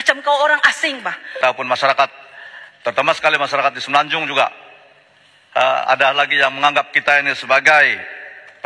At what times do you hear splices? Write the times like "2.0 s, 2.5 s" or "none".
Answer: 1.4 s